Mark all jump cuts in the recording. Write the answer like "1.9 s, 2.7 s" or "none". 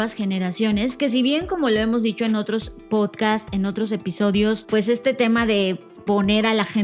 4.6 s